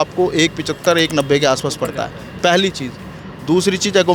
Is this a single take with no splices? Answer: yes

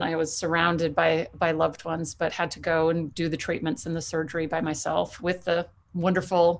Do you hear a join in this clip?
no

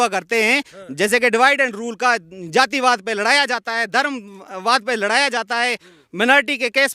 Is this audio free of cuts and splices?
yes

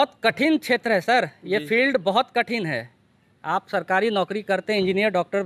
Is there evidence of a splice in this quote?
no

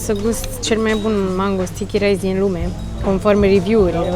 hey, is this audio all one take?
yes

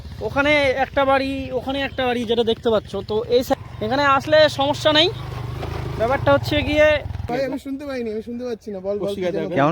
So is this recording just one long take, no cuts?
no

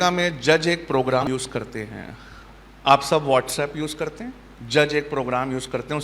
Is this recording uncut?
no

